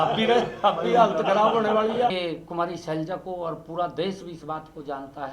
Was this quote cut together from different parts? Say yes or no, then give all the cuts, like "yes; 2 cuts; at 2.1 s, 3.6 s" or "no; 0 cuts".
yes; 1 cut; at 2.1 s